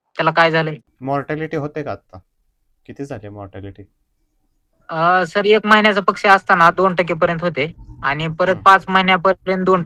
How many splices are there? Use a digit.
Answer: 0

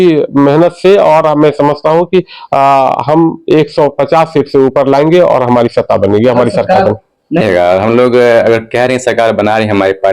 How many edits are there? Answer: 1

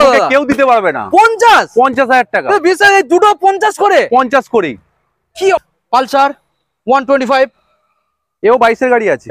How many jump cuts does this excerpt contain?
1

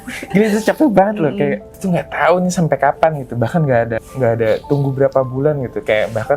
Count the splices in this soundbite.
2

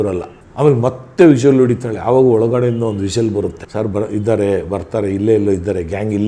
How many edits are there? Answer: 0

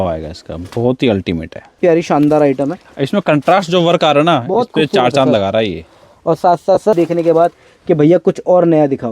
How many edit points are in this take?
2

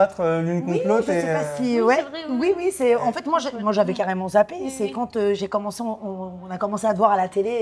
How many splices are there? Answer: 0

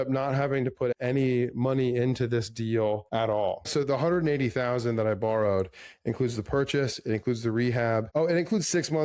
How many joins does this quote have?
0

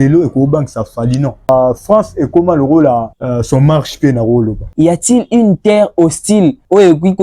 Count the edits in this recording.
2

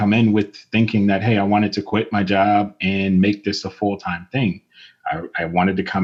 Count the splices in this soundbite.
0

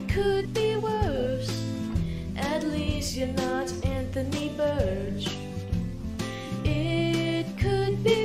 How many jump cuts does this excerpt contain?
0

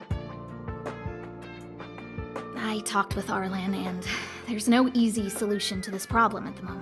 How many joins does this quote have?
1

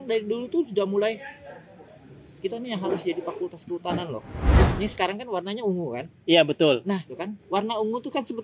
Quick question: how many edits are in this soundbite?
2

